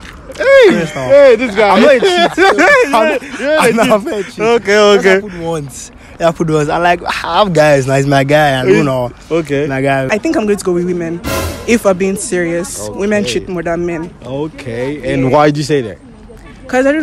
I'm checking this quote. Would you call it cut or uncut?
cut